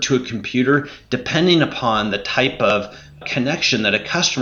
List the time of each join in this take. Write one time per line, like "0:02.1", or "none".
0:03.2